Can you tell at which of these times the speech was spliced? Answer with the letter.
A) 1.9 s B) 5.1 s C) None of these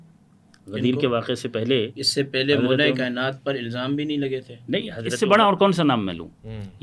B